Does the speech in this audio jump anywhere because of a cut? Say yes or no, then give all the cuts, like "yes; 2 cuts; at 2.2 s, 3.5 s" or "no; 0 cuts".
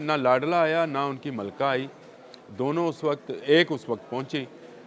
no; 0 cuts